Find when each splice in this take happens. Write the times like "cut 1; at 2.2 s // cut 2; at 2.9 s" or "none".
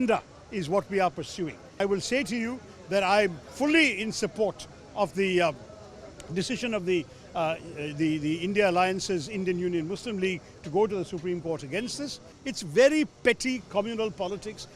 cut 1; at 1.8 s // cut 2; at 12.3 s